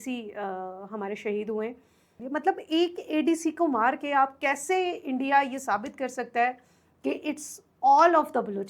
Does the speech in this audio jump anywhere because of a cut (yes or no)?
yes